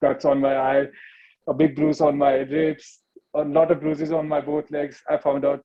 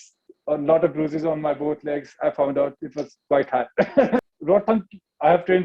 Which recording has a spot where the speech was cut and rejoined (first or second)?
second